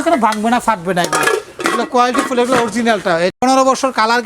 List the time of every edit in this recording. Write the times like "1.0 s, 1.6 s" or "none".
3.3 s